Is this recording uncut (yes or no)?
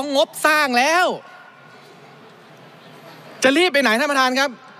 yes